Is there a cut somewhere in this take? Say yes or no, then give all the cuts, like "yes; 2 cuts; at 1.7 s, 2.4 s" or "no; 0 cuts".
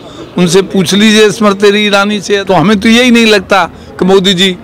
yes; 1 cut; at 2.4 s